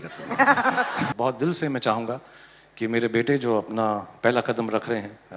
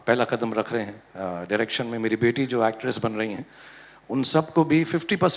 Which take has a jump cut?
first; 1 cut; at 1.1 s

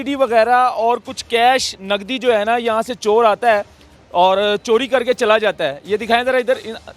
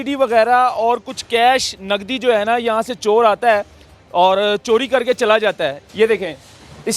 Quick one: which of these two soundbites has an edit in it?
second; 1 cut; at 5.8 s

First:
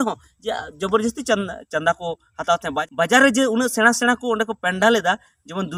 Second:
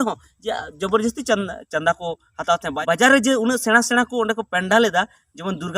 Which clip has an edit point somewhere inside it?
second; 1 cut; at 2.8 s

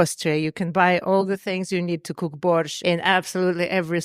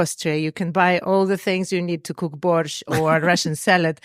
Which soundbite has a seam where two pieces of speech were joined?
first; 1 cut; at 2.7 s

